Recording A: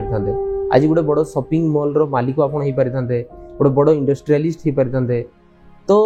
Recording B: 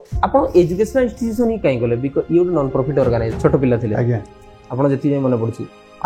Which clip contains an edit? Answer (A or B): B